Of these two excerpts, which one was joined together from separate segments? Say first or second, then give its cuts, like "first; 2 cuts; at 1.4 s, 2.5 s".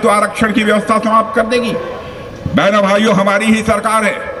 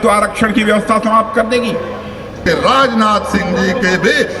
second; 1 cut; at 2.5 s